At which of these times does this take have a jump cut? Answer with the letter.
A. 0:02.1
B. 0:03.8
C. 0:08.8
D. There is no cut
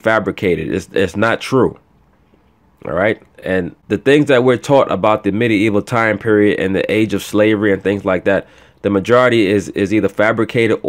B